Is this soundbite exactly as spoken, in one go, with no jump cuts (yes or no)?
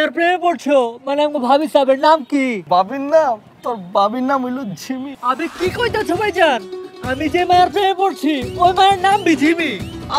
no